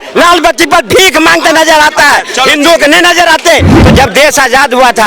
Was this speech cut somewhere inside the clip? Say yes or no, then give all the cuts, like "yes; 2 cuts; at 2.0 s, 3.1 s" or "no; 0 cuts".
yes; 1 cut; at 3.7 s